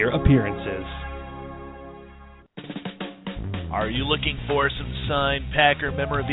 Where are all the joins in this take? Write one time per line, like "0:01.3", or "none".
0:02.4

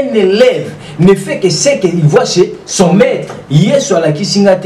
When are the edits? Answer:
0:03.3

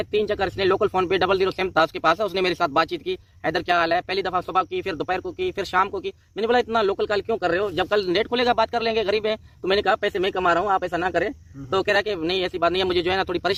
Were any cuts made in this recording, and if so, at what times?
none

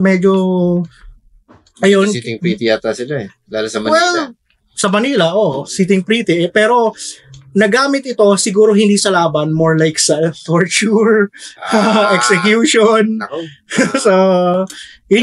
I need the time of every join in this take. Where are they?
none

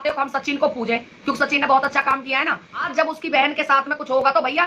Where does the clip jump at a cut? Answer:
0:02.9

